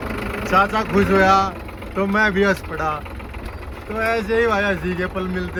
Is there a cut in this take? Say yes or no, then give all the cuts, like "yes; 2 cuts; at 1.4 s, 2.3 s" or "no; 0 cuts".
no; 0 cuts